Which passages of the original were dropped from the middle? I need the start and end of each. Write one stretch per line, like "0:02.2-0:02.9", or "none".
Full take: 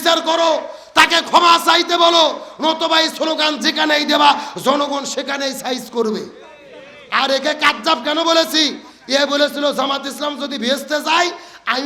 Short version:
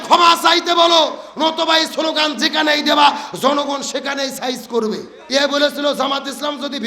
0:06.4-0:08.9